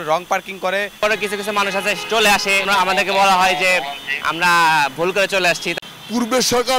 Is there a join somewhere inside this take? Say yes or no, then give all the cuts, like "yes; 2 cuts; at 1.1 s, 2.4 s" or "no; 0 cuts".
yes; 3 cuts; at 1.0 s, 2.7 s, 5.7 s